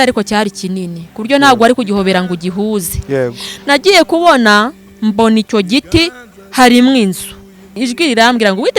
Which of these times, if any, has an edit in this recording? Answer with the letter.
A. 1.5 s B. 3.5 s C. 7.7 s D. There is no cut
C